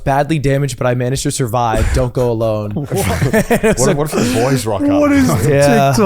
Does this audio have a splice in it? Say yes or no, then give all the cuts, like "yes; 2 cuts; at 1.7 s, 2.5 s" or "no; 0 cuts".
no; 0 cuts